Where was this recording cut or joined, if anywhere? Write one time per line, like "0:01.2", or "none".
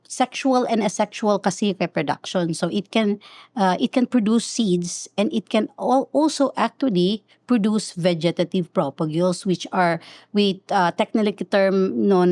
none